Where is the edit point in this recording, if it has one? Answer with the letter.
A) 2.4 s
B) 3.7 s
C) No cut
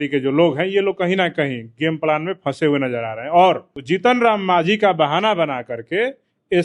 B